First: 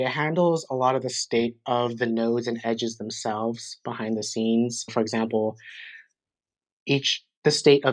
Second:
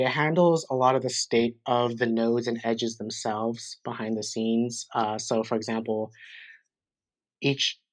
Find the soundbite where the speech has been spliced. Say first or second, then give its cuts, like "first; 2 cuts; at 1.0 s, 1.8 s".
first; 1 cut; at 4.9 s